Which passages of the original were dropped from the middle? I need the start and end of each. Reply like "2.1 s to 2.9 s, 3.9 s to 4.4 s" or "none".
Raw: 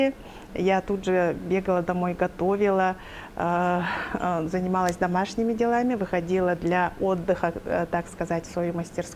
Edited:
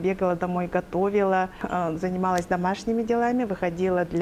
3.1 s to 4.1 s